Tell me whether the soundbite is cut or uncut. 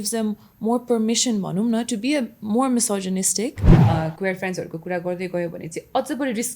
cut